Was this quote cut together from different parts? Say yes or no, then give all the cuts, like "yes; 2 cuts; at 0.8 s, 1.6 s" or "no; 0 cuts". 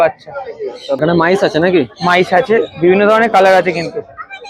yes; 1 cut; at 1.0 s